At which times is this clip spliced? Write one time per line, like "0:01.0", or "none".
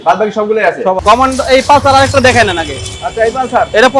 0:01.0

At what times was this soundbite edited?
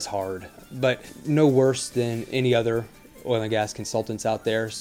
none

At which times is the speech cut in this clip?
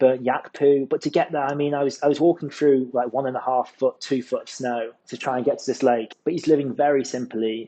0:04.9
0:06.1

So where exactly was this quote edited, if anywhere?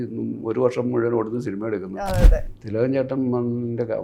0:02.5

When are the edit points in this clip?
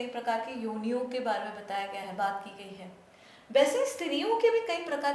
none

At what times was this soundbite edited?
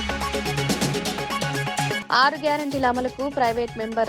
0:02.0

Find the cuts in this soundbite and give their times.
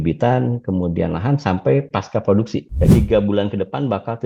0:02.9

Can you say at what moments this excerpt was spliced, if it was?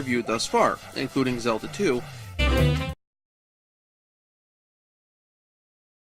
none

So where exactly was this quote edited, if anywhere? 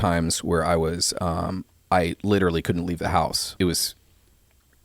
0:03.4

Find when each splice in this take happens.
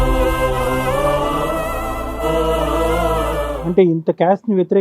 0:03.5

